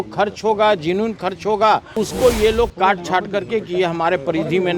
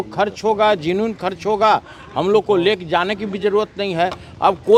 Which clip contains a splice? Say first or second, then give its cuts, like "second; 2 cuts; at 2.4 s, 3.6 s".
first; 1 cut; at 2.0 s